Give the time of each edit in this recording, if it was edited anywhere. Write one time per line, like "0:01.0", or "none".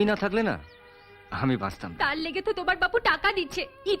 0:01.9